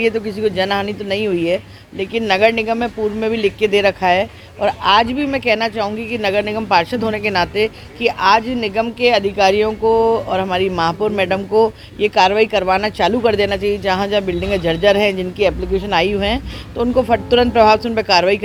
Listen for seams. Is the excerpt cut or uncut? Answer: uncut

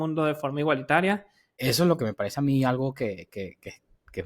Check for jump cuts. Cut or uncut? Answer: cut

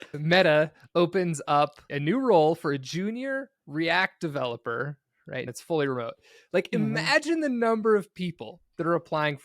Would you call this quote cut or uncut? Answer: cut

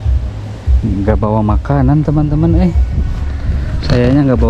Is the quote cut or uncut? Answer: uncut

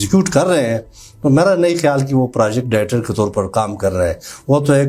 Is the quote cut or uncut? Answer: uncut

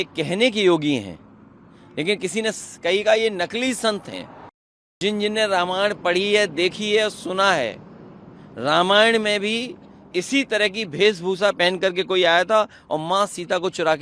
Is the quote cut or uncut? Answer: cut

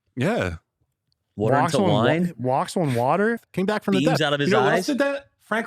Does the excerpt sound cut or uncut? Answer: cut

